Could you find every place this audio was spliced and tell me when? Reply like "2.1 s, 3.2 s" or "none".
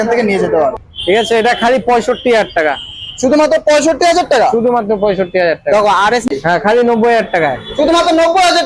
0.9 s, 6.3 s